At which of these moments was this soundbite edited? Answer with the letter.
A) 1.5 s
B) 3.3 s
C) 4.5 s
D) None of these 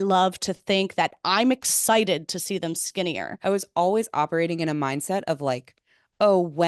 B